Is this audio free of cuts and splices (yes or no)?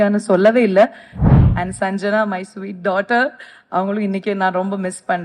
no